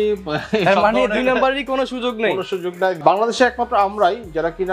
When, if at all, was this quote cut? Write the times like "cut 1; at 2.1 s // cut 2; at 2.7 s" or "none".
cut 1; at 3.0 s